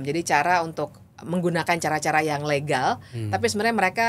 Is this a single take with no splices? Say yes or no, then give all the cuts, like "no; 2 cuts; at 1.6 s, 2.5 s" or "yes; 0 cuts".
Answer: yes; 0 cuts